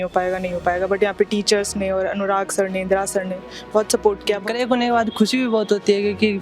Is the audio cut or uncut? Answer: cut